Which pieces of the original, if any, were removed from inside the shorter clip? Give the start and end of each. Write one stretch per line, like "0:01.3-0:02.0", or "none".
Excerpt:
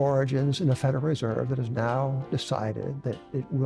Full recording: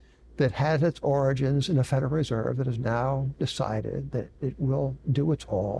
none

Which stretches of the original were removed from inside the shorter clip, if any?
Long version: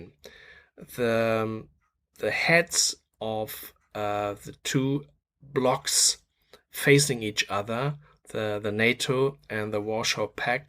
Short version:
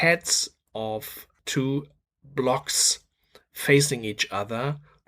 0:03.8-0:04.5

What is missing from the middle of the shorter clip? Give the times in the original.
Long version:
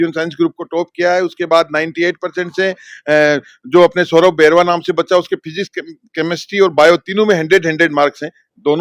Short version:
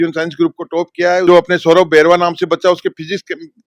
0:01.2-0:03.7

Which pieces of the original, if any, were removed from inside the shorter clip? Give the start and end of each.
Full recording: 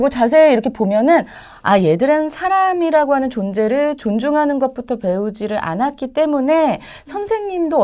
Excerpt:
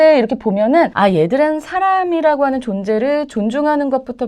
0:01.3-0:01.6

